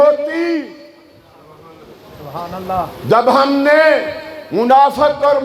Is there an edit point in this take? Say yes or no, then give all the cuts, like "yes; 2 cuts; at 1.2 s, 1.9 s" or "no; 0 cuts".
no; 0 cuts